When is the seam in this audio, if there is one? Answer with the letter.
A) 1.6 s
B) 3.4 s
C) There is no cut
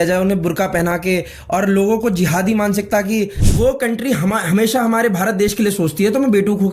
B